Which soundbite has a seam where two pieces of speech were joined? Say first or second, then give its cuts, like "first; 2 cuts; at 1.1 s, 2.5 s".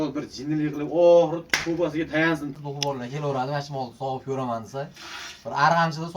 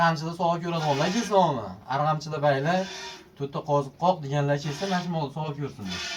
first; 1 cut; at 2.5 s